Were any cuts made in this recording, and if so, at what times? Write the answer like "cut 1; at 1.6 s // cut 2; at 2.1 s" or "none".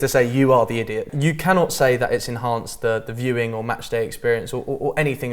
cut 1; at 1.0 s

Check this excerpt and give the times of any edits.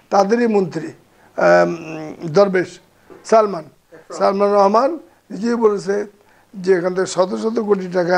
cut 1; at 3.1 s

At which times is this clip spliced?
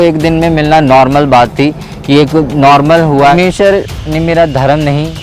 cut 1; at 3.3 s

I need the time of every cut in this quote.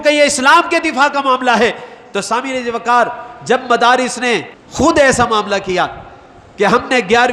none

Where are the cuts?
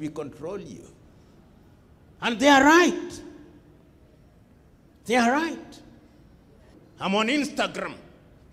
cut 1; at 6.7 s

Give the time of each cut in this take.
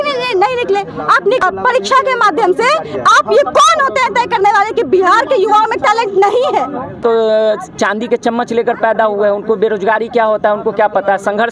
cut 1; at 1.4 s // cut 2; at 7.0 s

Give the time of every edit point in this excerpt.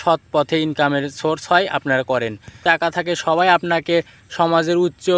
cut 1; at 2.6 s

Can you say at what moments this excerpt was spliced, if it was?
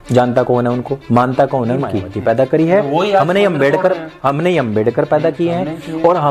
cut 1; at 2.0 s

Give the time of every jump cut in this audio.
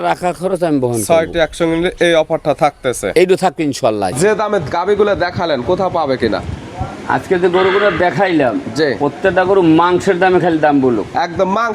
cut 1; at 4.2 s

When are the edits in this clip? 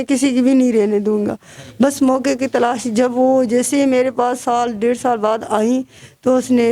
none

